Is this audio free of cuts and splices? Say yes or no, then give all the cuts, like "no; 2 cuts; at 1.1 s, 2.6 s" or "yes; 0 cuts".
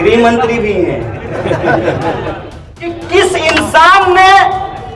no; 1 cut; at 3.0 s